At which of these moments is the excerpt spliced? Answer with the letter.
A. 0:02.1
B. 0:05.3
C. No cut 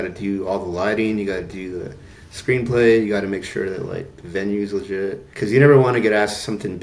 B